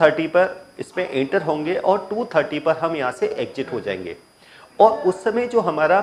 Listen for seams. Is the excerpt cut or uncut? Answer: uncut